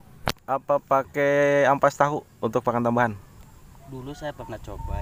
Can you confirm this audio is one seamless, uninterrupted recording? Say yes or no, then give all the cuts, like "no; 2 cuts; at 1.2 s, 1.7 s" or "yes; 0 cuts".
yes; 0 cuts